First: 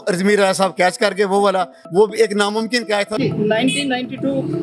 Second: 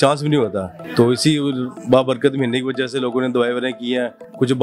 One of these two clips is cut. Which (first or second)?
first